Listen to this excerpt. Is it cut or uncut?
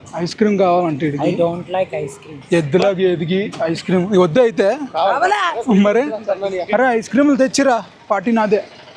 uncut